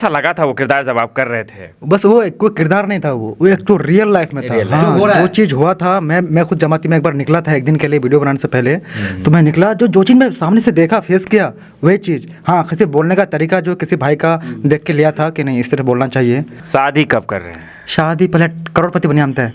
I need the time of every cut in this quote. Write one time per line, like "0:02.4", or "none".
0:16.6